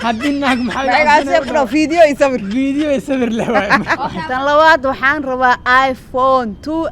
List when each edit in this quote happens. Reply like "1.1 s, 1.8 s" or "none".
4.2 s